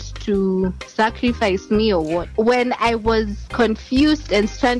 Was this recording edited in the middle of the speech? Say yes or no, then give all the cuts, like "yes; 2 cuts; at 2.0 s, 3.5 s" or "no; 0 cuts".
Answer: yes; 1 cut; at 2.3 s